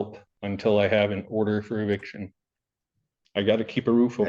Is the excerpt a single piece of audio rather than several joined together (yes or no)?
no